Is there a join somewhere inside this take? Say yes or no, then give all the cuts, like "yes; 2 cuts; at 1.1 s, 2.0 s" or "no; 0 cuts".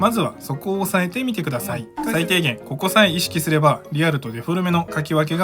yes; 1 cut; at 1.9 s